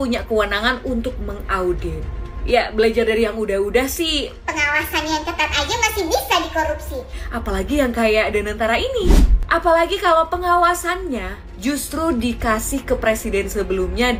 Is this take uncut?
yes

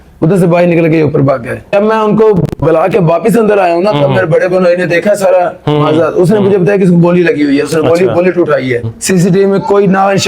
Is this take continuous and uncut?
no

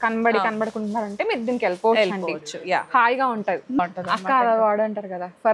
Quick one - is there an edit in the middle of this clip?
yes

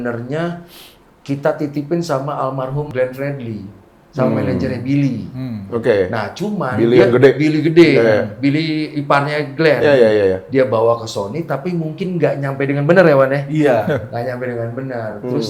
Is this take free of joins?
yes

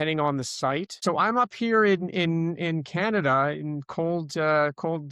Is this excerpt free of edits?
no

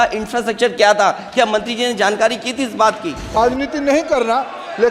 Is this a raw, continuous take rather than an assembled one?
no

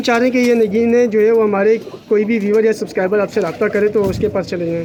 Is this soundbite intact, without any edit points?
yes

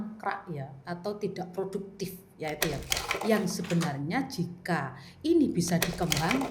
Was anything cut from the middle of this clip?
no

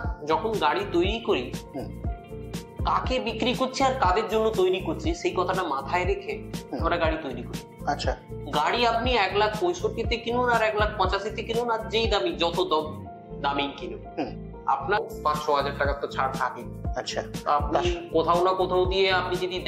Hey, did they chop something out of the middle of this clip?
yes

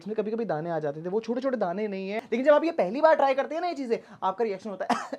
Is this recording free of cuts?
no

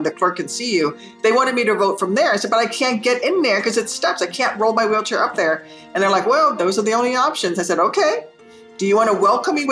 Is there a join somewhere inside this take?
no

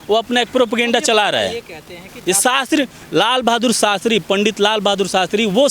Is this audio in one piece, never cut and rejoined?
yes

